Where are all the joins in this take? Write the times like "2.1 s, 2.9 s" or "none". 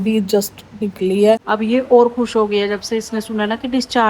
1.4 s